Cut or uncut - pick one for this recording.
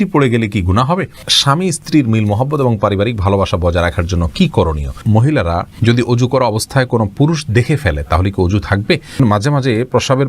cut